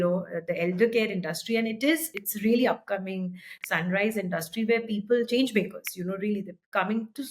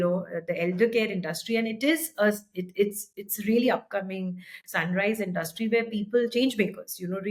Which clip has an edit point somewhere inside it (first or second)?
first